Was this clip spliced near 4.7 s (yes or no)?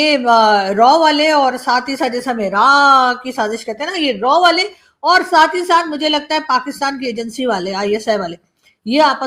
no